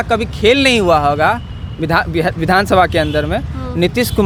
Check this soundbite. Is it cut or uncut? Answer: uncut